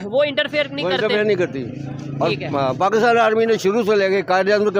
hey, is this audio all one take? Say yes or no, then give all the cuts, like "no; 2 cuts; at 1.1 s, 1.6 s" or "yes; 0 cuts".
yes; 0 cuts